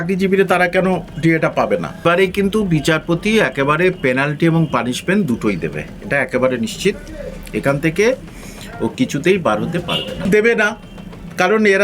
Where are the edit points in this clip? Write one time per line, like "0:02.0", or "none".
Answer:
0:02.0
0:10.3